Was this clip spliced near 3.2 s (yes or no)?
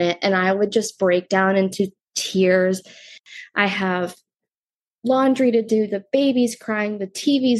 yes